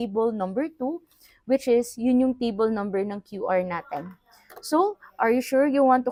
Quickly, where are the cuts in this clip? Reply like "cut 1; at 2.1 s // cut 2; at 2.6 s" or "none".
none